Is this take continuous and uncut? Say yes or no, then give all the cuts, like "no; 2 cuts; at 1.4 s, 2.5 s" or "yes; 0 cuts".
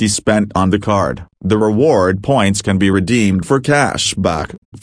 yes; 0 cuts